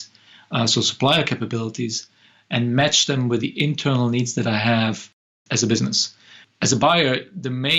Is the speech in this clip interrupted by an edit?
yes; 2 cuts; at 5.4 s, 6.4 s

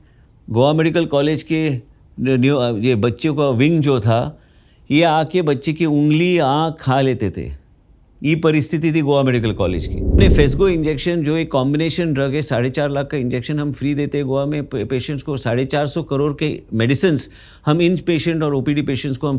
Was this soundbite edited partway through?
yes; 1 cut; at 10.2 s

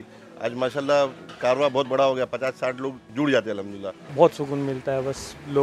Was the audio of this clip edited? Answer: yes; 3 cuts; at 1.2 s, 3.0 s, 4.1 s

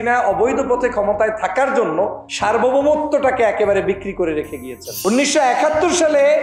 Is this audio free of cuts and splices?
no; 2 cuts; at 2.2 s, 4.8 s

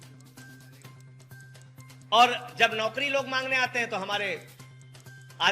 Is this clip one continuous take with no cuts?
no; 2 cuts; at 1.0 s, 2.1 s

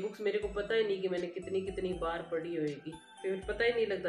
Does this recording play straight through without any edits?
no; 1 cut; at 3.2 s

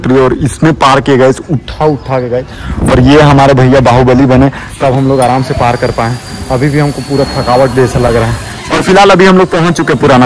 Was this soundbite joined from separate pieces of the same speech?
no; 0 cuts

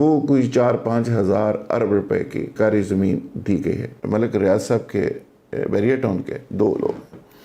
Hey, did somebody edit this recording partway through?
yes; 2 cuts; at 2.5 s, 3.9 s

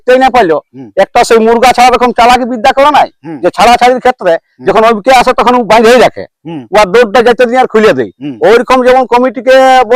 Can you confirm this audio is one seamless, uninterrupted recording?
yes; 0 cuts

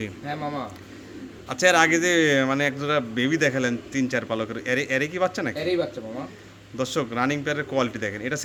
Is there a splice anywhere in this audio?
no; 0 cuts

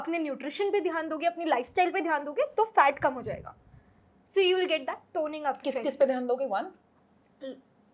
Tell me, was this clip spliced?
no; 0 cuts

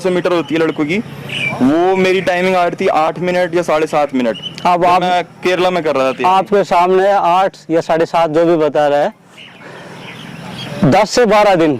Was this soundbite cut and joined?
no; 0 cuts

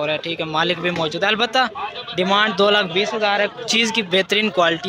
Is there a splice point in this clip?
no; 0 cuts

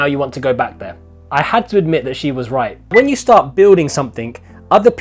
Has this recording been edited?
yes; 1 cut; at 2.9 s

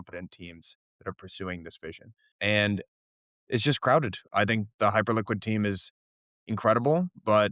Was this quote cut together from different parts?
yes; 2 cuts; at 2.3 s, 4.2 s

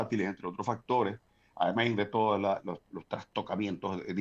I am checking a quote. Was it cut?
no; 0 cuts

